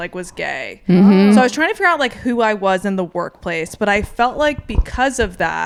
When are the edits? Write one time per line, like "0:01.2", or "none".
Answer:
none